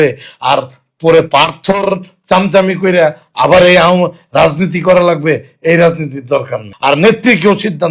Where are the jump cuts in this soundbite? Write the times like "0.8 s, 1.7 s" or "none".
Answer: 6.6 s